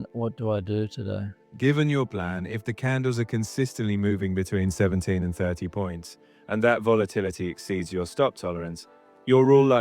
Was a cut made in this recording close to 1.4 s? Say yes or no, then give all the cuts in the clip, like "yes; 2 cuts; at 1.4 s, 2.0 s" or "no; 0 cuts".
yes; 1 cut; at 1.4 s